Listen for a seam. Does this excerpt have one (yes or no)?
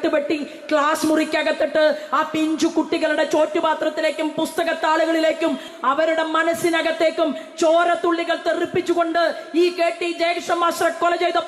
no